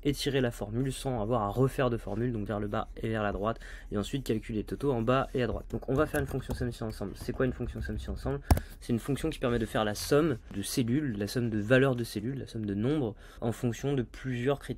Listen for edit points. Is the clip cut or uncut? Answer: cut